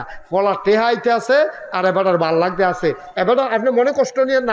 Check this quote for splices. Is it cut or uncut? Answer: uncut